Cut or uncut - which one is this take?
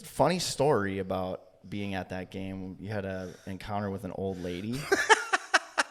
uncut